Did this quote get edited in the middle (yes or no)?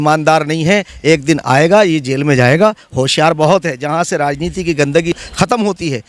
yes